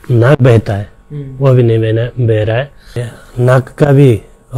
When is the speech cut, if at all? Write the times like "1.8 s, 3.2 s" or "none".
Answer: 3.0 s